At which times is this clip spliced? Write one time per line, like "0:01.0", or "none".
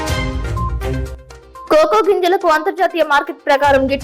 none